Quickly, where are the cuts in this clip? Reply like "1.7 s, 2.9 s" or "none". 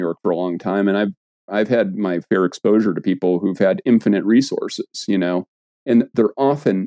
none